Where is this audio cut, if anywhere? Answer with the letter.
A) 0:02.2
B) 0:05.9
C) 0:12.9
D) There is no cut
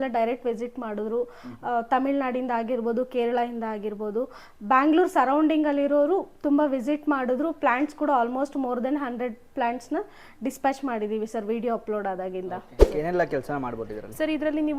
C